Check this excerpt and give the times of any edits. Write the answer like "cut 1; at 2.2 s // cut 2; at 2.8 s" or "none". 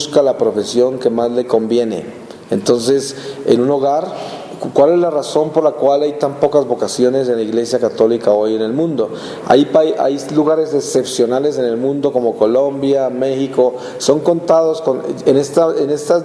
cut 1; at 11.7 s